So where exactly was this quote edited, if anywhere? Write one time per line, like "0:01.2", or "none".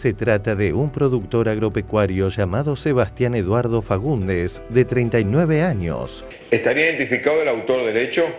0:06.2

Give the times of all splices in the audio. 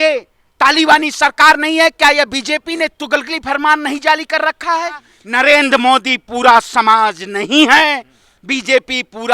0:05.2

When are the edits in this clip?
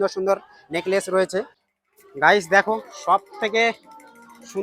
0:01.5

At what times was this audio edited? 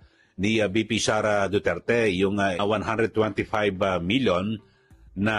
0:02.6

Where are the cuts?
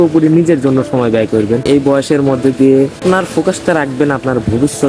none

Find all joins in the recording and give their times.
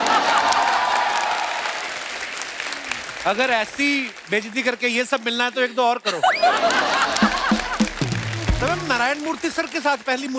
0:08.6

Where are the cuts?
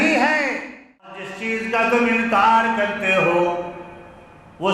0:01.3

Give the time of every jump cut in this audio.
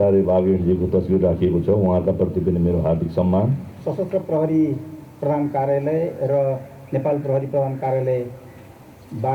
0:03.7

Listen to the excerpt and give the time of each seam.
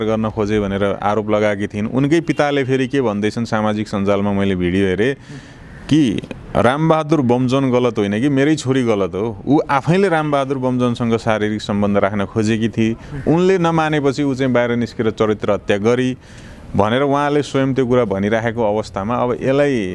none

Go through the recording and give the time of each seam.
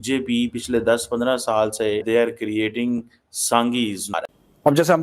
0:02.0
0:04.1

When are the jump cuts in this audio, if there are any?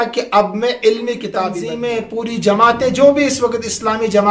0:01.6

